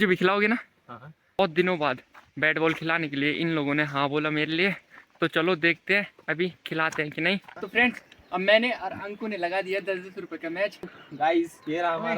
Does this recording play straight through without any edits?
no; 3 cuts; at 1.4 s, 7.6 s, 11.0 s

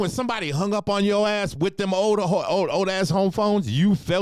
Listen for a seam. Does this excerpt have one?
no; 0 cuts

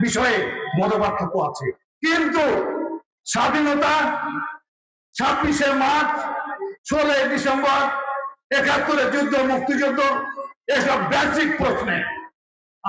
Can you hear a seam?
yes; 1 cut; at 1.8 s

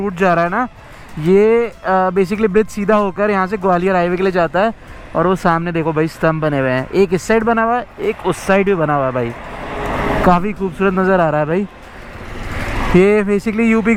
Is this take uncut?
yes; 0 cuts

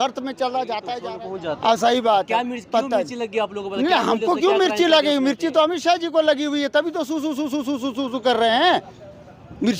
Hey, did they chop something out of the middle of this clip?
yes; 1 cut; at 1.0 s

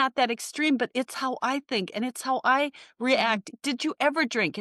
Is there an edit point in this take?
yes; 1 cut; at 3.5 s

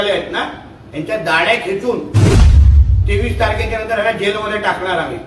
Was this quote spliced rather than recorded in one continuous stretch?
yes; 1 cut; at 2.0 s

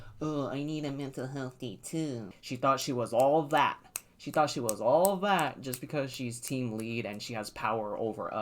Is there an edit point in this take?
yes; 1 cut; at 2.3 s

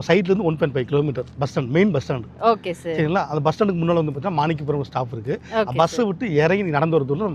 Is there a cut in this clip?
no; 0 cuts

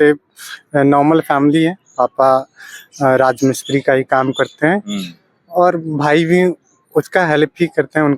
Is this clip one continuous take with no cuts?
yes; 0 cuts

